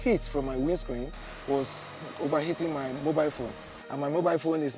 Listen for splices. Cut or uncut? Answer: uncut